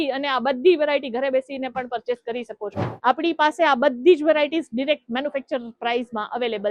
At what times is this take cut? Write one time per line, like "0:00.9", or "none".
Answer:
0:02.9